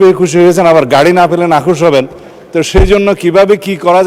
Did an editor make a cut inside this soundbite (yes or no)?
no